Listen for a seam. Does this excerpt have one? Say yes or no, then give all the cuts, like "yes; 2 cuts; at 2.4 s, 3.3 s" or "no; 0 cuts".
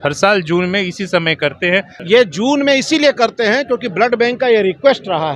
yes; 1 cut; at 1.9 s